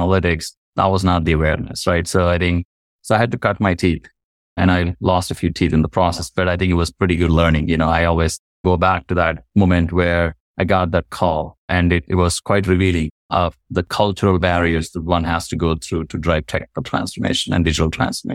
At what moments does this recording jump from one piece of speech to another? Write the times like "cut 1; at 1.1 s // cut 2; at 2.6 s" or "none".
cut 1; at 10.4 s // cut 2; at 11.6 s // cut 3; at 13.2 s